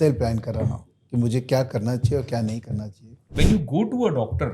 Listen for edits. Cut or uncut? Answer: cut